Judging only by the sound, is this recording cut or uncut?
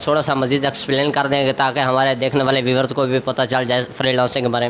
uncut